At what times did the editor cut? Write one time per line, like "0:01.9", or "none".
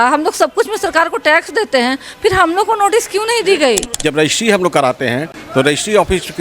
0:03.9
0:05.3